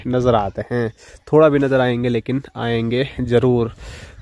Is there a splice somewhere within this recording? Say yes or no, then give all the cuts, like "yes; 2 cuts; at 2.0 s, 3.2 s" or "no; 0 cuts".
no; 0 cuts